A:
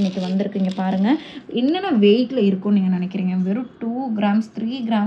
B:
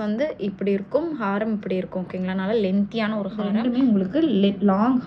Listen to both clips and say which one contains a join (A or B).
B